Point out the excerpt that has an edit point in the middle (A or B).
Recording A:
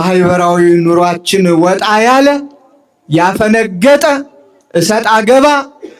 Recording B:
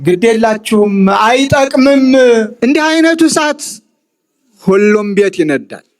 B